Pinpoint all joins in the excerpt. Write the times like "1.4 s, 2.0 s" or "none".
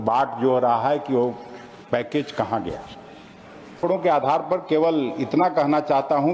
3.8 s